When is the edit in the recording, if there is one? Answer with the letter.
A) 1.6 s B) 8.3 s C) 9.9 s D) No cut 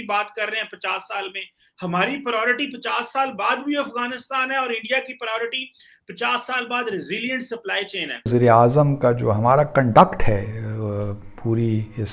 B